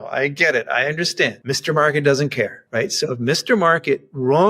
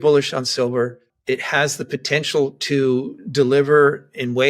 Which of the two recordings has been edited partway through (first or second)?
first